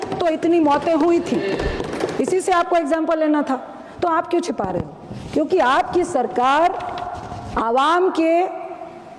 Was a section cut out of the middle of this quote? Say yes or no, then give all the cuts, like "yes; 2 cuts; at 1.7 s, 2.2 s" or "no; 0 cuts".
no; 0 cuts